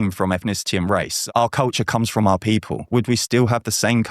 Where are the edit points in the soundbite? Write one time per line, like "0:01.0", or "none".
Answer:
0:01.2
0:02.9